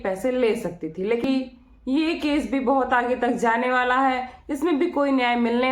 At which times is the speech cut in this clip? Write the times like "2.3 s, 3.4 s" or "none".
1.2 s